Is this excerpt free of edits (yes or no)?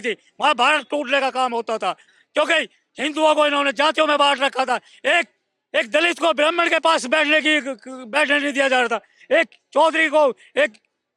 yes